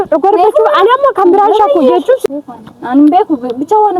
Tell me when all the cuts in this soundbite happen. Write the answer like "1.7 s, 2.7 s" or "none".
2.3 s